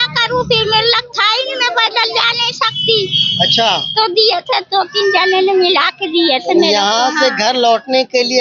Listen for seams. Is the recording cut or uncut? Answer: uncut